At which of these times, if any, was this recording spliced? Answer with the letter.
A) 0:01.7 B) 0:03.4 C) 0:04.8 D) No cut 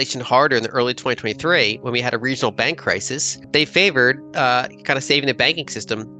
B